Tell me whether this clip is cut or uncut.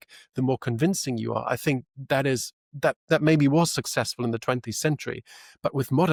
uncut